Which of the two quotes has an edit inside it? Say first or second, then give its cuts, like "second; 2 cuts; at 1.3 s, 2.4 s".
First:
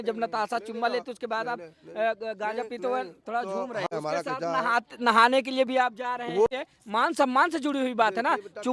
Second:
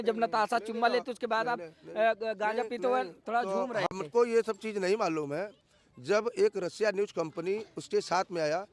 first; 2 cuts; at 3.9 s, 6.5 s